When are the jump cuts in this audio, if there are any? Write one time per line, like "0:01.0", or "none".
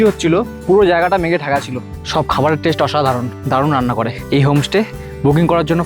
0:02.0
0:03.3
0:04.2

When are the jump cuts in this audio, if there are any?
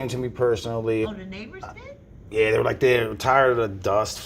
0:01.0

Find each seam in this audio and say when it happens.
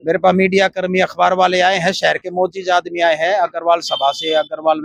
none

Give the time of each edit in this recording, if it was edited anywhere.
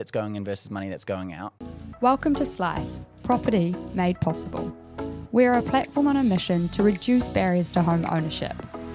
0:01.9

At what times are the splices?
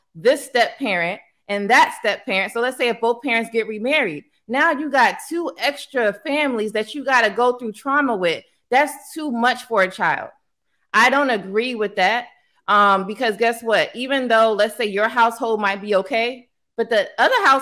none

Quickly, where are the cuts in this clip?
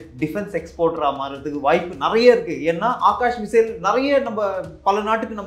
none

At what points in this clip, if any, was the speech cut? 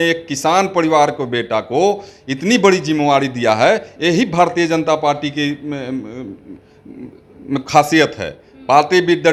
none

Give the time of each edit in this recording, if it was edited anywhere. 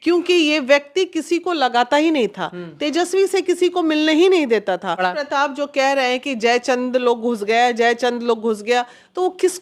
0:05.0

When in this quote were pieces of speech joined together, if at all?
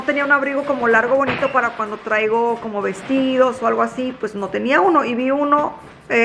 none

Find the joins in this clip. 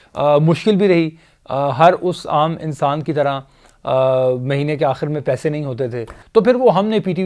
0:06.1

